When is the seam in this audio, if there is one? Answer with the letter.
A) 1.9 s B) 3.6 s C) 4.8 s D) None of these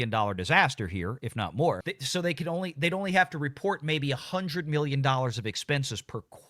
A